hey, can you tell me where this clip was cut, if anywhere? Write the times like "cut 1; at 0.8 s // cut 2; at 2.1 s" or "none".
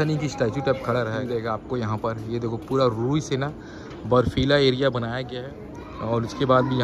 cut 1; at 1.2 s // cut 2; at 5.2 s

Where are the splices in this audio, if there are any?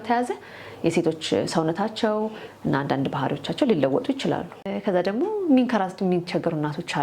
cut 1; at 4.7 s

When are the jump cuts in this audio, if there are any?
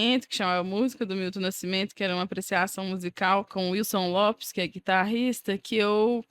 cut 1; at 3.5 s

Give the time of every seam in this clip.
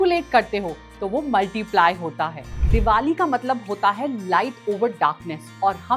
cut 1; at 2.6 s

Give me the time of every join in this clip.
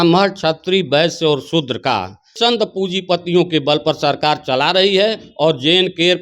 cut 1; at 2.3 s

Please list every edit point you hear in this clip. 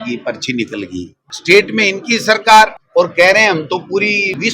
cut 1; at 1.3 s

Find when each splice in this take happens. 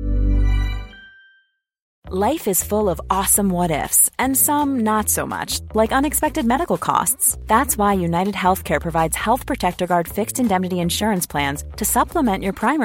cut 1; at 2.0 s

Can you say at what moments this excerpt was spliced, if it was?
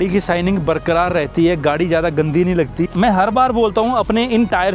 cut 1; at 2.9 s

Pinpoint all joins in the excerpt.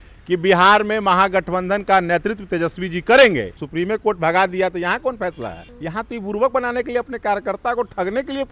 cut 1; at 3.6 s // cut 2; at 5.7 s

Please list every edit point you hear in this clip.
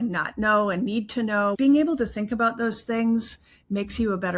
cut 1; at 1.6 s

